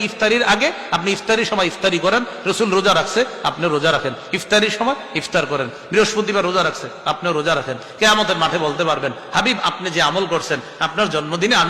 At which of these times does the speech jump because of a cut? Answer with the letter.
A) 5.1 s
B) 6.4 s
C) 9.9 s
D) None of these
A